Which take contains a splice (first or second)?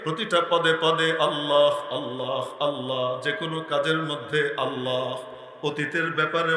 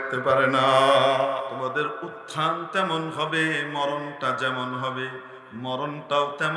second